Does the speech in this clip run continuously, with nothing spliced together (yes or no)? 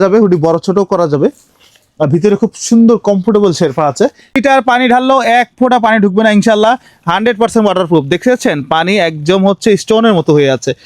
no